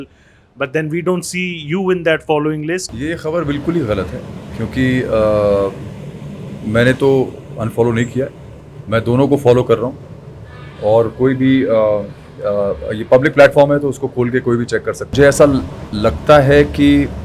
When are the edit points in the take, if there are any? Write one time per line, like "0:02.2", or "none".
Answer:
0:02.9
0:15.1